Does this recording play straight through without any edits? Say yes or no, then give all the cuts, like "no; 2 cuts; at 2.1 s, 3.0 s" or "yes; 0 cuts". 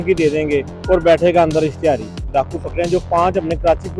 no; 1 cut; at 2.2 s